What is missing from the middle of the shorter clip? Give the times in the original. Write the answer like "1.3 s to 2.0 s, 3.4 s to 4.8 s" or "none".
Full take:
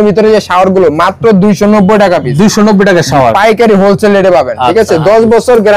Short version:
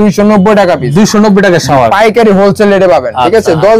none